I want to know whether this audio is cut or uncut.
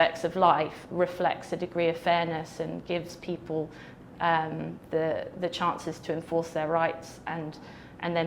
uncut